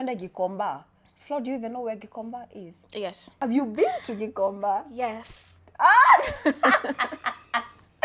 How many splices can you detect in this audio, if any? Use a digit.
0